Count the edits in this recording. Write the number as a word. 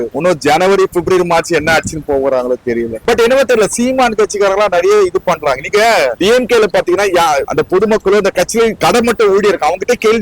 one